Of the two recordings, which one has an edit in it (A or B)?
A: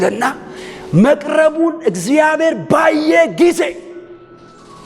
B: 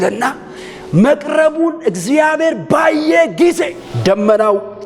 B